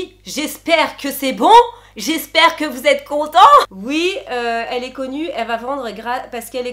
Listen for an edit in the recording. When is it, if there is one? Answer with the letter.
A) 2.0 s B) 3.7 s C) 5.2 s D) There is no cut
B